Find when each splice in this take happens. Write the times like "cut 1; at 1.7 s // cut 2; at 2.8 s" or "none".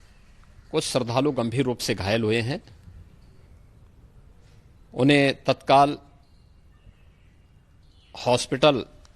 none